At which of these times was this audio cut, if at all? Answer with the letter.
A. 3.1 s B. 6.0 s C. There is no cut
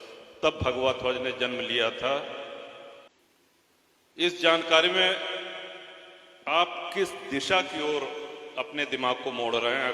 A